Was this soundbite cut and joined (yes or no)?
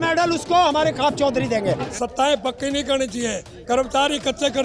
yes